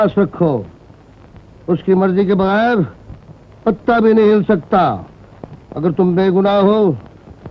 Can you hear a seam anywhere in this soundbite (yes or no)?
no